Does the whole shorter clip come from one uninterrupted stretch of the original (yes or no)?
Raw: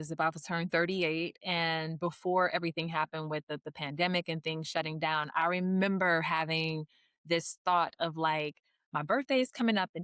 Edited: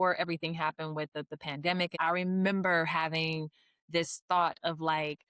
no